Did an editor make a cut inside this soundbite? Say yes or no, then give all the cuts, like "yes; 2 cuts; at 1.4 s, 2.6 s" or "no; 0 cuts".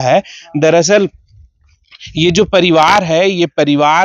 no; 0 cuts